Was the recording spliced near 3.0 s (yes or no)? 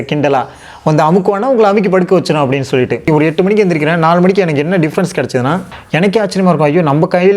yes